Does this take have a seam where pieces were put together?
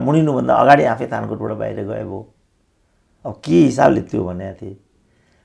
no; 0 cuts

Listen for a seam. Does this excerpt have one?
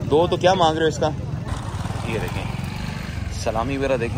yes; 1 cut; at 1.5 s

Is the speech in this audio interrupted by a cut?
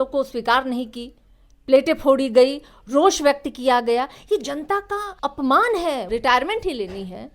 yes; 2 cuts; at 5.1 s, 6.1 s

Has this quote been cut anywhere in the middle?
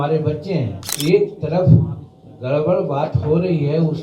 yes; 1 cut; at 0.9 s

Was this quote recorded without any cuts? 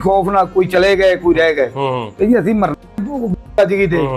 yes; 0 cuts

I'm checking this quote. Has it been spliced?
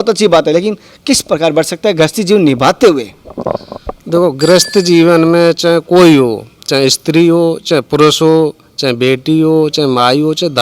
no; 0 cuts

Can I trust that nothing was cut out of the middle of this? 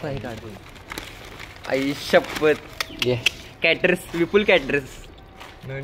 yes; 0 cuts

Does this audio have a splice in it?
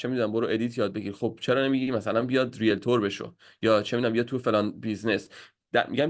no; 0 cuts

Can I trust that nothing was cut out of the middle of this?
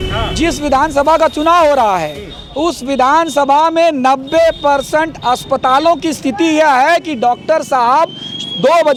yes; 0 cuts

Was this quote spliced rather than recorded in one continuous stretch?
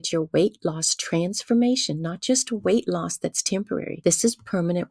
yes; 1 cut; at 3.9 s

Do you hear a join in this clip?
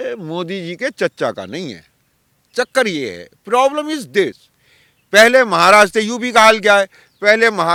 no; 0 cuts

